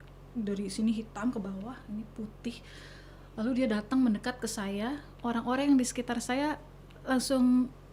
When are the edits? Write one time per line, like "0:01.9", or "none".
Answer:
none